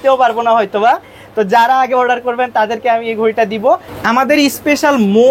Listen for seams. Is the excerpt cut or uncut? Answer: cut